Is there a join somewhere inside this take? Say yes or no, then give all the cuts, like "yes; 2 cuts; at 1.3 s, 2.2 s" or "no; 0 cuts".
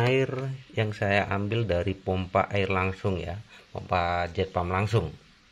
no; 0 cuts